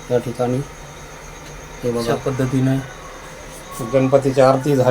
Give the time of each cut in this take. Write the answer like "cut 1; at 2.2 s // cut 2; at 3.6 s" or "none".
cut 1; at 2.2 s